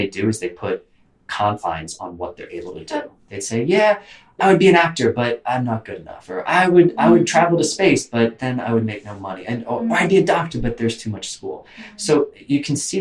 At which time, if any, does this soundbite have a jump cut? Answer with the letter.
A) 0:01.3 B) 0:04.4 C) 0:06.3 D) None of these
B